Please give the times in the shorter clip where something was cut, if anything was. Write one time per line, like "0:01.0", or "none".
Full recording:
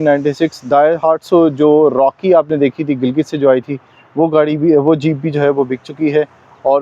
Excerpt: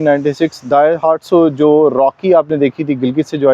none